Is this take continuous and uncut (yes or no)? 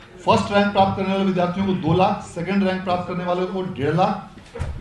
yes